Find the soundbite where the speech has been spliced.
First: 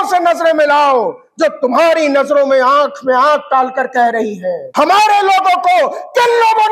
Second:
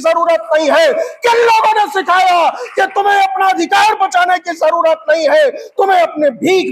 first; 1 cut; at 4.6 s

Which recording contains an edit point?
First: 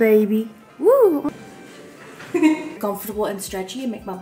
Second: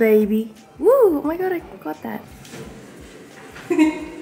first; 2 cuts; at 1.3 s, 2.8 s

